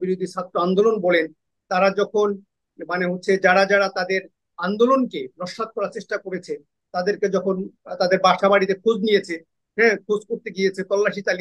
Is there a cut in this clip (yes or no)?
no